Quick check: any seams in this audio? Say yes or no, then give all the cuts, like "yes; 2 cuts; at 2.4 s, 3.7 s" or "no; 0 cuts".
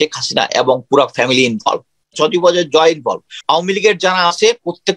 yes; 2 cuts; at 2.2 s, 3.3 s